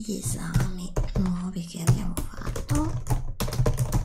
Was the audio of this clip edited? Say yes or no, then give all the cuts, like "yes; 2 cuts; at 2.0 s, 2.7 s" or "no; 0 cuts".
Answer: no; 0 cuts